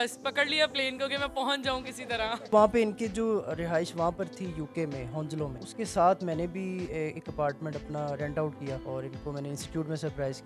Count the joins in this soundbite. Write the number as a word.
three